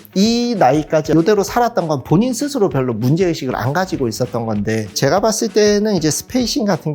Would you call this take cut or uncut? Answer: cut